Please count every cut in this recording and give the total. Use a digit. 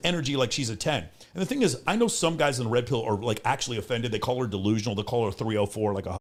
0